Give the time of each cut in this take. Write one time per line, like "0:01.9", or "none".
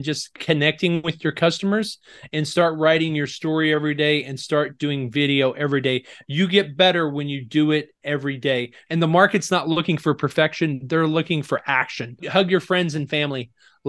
0:08.7
0:12.2